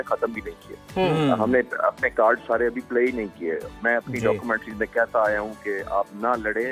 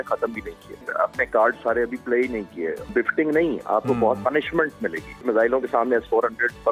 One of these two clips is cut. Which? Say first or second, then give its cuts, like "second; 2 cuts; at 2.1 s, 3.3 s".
second; 3 cuts; at 0.9 s, 2.8 s, 5.2 s